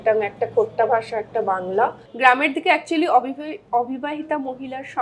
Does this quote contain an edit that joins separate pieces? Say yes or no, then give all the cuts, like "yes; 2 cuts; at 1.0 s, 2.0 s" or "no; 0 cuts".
yes; 1 cut; at 2.0 s